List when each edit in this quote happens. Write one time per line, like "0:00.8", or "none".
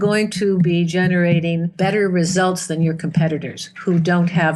0:01.7